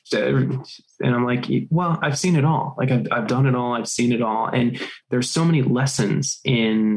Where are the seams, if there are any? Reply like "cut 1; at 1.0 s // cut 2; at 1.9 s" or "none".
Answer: cut 1; at 4.9 s